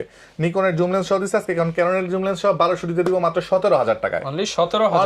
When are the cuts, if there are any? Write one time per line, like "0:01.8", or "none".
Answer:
none